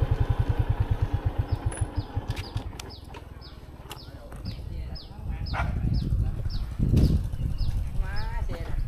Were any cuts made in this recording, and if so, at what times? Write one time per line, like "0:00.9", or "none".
none